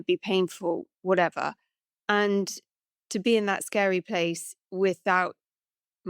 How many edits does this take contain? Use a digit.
1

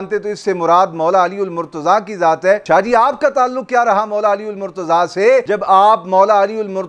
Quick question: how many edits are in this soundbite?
2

